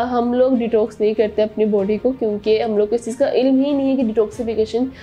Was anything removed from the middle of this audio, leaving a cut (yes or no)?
no